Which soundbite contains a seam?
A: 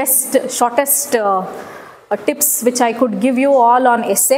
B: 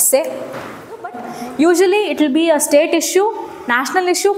B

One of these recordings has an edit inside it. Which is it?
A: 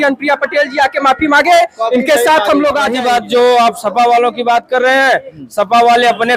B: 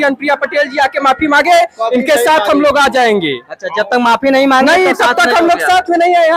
A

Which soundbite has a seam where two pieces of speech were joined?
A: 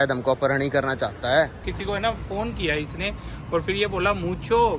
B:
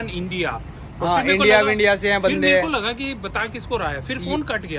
A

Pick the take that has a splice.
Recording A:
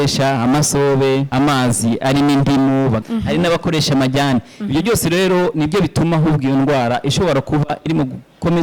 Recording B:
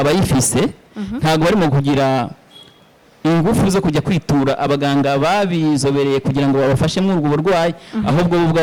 A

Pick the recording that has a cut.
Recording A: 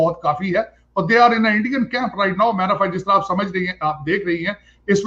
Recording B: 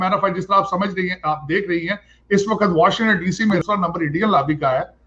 B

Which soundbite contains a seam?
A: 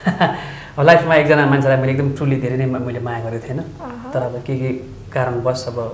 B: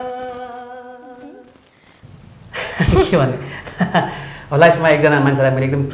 B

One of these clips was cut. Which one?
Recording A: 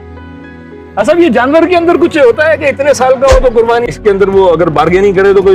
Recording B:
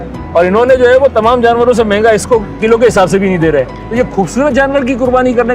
A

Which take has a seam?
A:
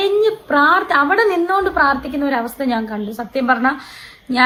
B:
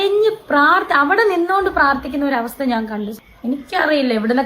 B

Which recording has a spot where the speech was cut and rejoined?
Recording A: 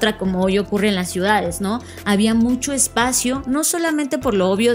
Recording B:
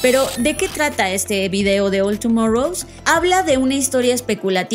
B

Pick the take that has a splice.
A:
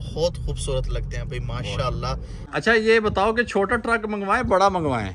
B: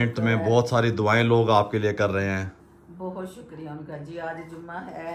A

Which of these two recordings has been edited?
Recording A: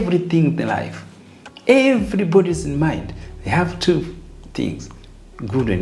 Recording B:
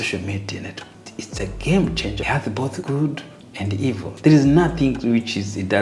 B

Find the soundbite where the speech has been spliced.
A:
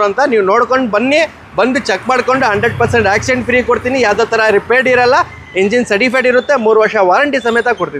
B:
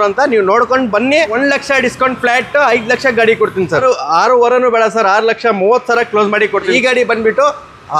B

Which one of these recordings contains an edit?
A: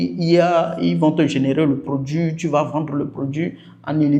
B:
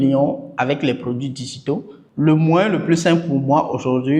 B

